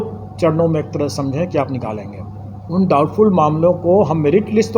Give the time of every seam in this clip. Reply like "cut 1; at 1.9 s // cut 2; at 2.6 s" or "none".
cut 1; at 2.7 s